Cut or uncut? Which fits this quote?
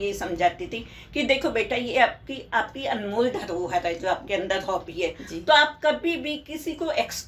uncut